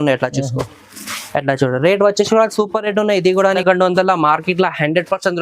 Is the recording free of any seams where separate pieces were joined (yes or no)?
no